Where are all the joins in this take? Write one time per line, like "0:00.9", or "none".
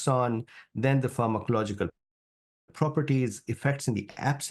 none

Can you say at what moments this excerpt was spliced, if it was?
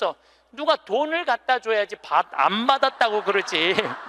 none

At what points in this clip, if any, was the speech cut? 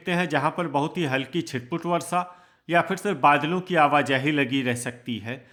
none

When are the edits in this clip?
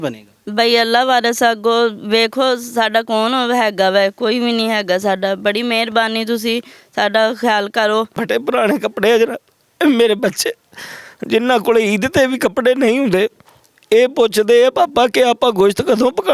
0:08.2

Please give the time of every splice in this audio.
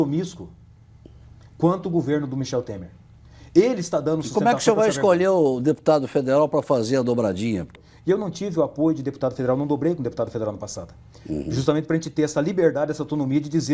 0:07.7

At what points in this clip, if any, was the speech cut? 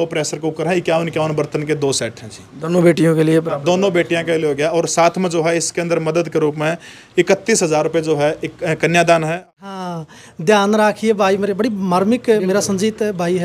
0:09.4

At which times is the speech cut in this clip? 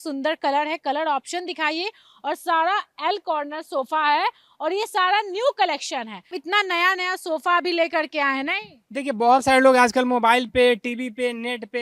none

